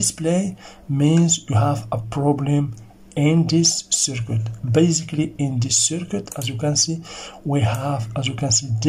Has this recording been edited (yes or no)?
no